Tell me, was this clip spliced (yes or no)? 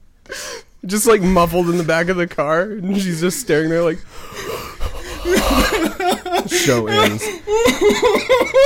yes